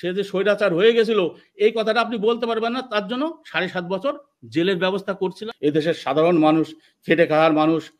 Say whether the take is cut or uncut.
cut